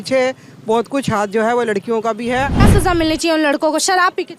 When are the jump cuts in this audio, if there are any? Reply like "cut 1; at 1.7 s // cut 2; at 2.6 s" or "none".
cut 1; at 2.6 s